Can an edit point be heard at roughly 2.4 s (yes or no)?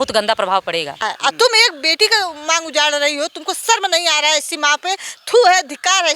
no